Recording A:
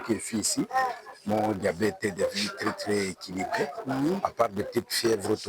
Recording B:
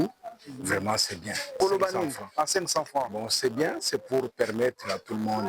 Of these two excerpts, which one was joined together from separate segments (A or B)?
B